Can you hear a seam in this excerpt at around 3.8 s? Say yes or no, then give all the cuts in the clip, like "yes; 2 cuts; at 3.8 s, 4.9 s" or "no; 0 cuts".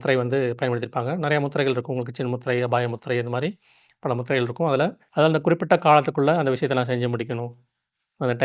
no; 1 cut; at 5.0 s